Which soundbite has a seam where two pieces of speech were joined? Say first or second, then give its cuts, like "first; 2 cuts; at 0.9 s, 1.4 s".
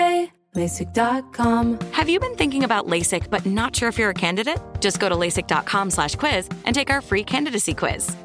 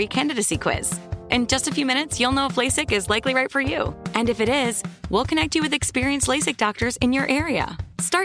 first; 1 cut; at 1.6 s